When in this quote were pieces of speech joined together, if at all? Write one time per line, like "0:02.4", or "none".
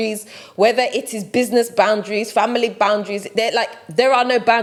none